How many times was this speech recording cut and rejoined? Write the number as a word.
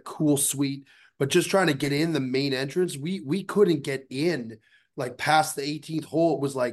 one